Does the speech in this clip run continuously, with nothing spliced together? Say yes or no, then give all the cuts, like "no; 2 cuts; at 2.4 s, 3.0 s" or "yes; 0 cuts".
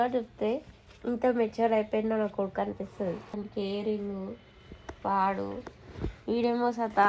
no; 1 cut; at 3.3 s